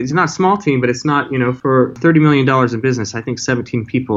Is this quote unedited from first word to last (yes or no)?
no